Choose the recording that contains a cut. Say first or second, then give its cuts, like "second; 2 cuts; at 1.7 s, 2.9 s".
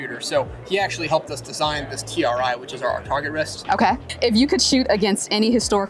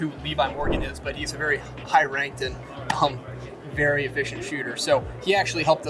first; 1 cut; at 4.1 s